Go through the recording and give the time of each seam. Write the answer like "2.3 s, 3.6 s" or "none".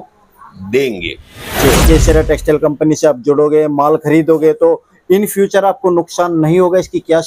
1.8 s